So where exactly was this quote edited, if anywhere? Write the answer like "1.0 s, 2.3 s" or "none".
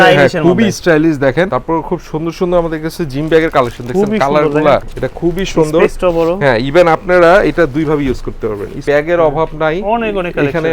1.5 s, 4.8 s, 8.8 s